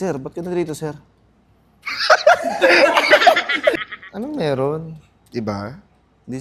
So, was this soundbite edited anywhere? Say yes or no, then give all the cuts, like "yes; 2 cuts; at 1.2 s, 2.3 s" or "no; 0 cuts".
no; 0 cuts